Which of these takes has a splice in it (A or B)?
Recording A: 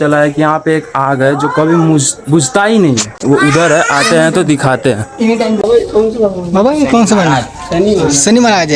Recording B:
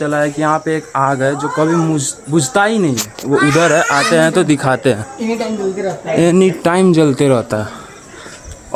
A